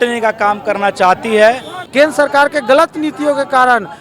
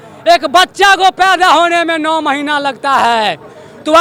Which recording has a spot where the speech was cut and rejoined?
first; 1 cut; at 1.7 s

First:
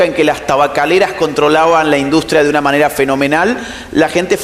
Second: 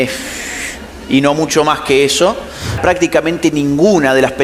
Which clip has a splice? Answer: second; 1 cut; at 2.8 s

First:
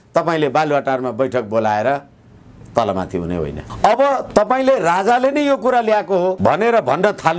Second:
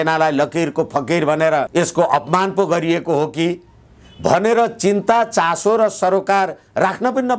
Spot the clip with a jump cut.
first; 2 cuts; at 3.6 s, 6.4 s

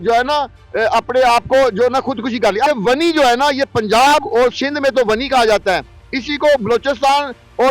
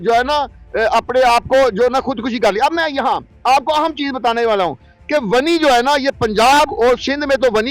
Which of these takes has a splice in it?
first; 1 cut; at 2.7 s

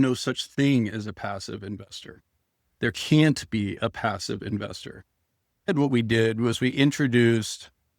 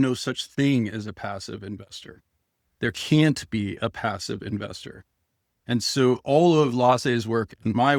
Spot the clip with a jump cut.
first; 1 cut; at 5.7 s

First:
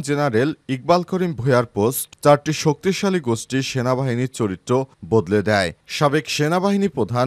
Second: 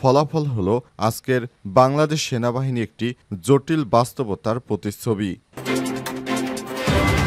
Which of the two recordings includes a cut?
second; 1 cut; at 5.4 s

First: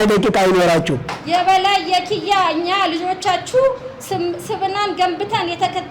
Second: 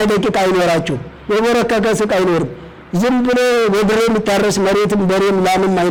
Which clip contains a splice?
first; 1 cut; at 1.1 s

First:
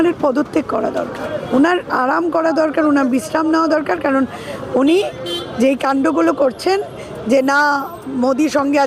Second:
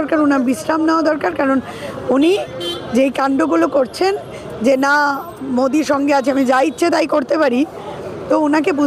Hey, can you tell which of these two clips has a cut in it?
first; 1 cut; at 1.5 s

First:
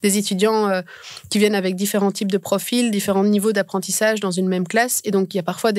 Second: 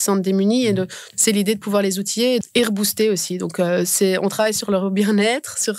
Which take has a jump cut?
second; 2 cuts; at 1.0 s, 2.4 s

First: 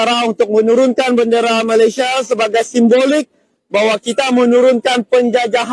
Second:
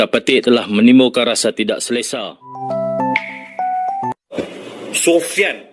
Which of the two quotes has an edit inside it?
second; 1 cut; at 2.5 s

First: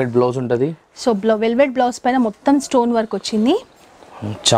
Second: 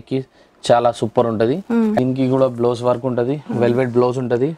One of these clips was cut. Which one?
second; 1 cut; at 2.0 s

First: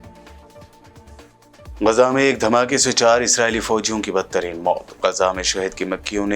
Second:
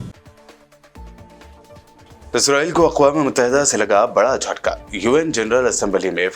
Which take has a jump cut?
first; 1 cut; at 1.2 s

